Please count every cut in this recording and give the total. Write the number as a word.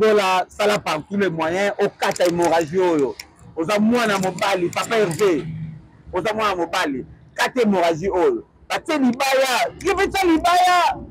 zero